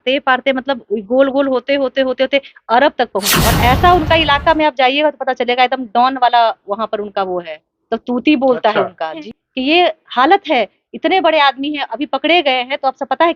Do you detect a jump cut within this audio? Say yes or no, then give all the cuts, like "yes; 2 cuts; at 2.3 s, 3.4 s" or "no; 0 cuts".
yes; 2 cuts; at 3.2 s, 9.2 s